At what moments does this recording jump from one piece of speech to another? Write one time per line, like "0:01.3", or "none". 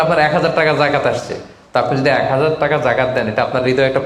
none

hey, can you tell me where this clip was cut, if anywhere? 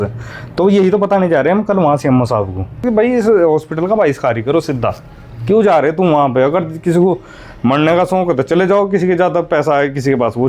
0:02.8

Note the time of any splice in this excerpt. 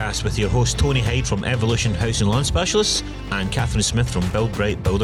none

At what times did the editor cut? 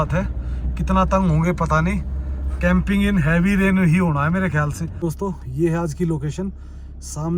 0:04.8

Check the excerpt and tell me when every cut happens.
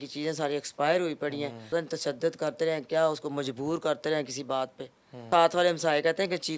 0:01.7
0:05.3

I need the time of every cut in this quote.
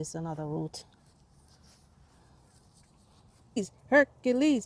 0:03.6

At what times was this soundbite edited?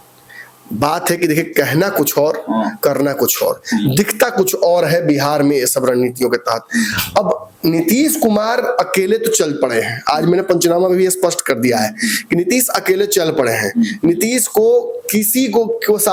none

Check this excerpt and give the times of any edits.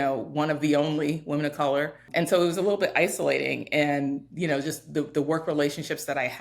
0:02.0

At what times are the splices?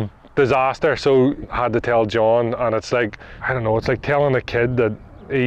0:01.5

